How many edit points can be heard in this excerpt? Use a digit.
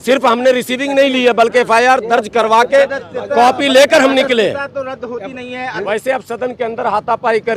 1